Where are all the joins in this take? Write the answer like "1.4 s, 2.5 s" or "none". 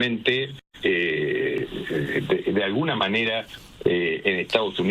none